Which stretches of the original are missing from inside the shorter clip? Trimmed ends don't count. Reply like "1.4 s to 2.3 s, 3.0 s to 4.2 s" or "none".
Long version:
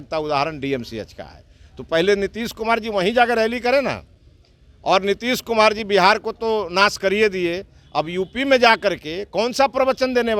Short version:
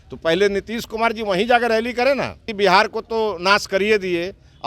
4.2 s to 5.8 s

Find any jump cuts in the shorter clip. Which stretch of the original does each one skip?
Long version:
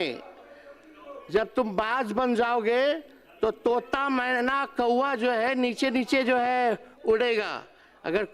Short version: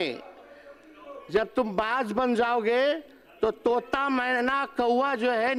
none

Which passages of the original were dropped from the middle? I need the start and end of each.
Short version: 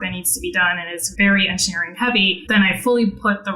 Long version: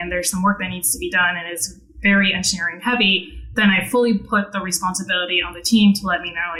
1.6 s to 1.8 s, 3.2 s to 3.5 s

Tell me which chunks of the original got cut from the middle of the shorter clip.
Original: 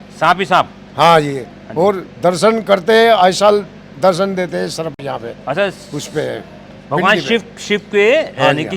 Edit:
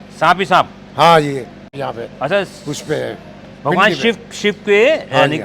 1.6 s to 4.9 s

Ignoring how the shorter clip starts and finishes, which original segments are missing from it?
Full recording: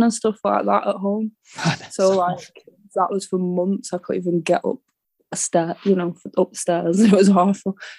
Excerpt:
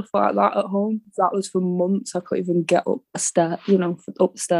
1.4 s to 2.8 s, 4.9 s to 5.3 s

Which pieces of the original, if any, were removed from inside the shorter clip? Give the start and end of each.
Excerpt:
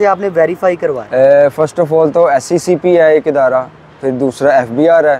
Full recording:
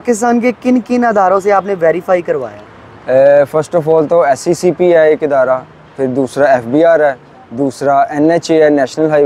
2.5 s to 3.0 s

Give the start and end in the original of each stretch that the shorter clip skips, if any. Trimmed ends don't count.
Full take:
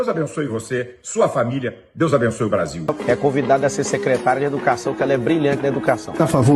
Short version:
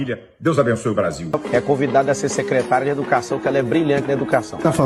none

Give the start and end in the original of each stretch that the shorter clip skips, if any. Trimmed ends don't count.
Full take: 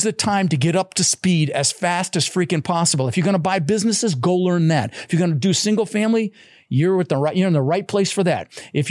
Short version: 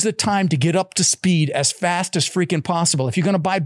none

